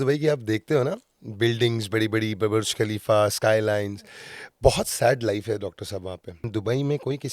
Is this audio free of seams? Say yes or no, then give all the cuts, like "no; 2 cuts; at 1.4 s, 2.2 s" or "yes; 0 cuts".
no; 1 cut; at 6.3 s